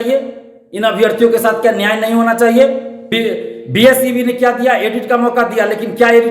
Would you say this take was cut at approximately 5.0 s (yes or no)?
no